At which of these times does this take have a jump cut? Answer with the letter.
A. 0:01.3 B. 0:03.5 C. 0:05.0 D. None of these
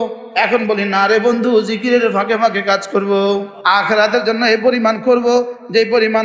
B